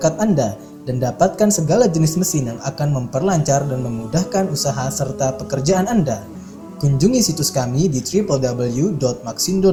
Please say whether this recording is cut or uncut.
uncut